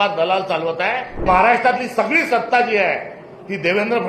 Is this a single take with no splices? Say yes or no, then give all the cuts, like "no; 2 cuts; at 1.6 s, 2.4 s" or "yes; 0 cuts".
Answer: no; 1 cut; at 1.2 s